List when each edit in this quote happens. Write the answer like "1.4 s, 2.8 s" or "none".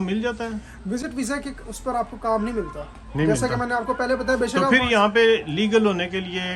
none